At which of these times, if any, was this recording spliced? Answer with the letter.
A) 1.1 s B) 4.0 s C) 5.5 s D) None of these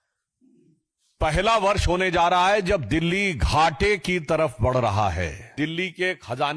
C